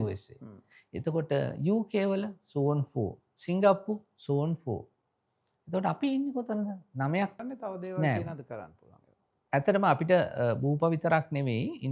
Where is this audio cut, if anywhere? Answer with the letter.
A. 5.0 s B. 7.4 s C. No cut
B